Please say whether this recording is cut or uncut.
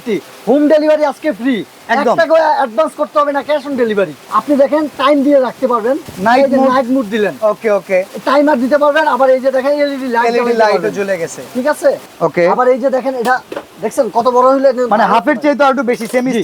cut